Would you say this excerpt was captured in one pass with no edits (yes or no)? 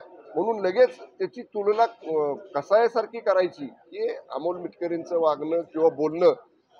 yes